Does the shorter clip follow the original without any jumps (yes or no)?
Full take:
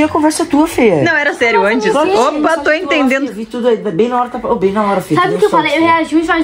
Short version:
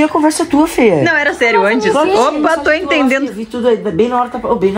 yes